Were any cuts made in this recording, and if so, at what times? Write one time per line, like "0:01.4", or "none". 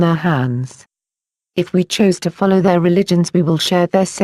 none